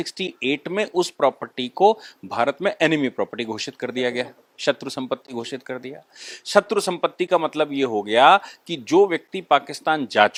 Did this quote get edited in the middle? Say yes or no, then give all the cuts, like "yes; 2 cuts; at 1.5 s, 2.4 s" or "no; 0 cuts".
no; 0 cuts